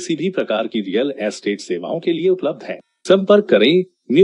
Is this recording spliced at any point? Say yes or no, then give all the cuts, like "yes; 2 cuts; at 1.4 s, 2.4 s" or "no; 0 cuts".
no; 0 cuts